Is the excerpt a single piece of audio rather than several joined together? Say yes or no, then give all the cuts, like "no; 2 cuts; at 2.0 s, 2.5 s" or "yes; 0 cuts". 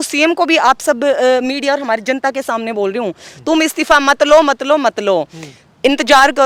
yes; 0 cuts